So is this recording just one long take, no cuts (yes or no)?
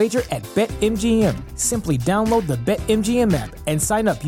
yes